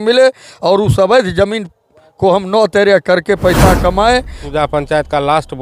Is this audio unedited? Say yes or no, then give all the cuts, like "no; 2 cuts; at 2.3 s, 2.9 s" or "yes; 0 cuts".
no; 1 cut; at 4.4 s